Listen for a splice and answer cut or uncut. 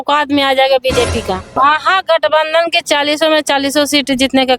cut